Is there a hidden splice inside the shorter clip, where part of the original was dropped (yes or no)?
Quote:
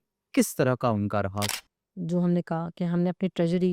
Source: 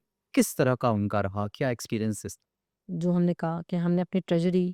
yes